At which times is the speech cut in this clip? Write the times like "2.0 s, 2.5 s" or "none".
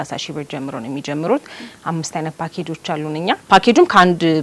3.4 s